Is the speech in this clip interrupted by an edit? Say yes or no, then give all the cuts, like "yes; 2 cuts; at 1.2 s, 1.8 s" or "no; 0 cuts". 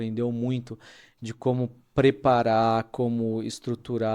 no; 0 cuts